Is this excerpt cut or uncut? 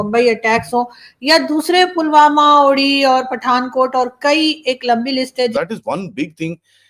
cut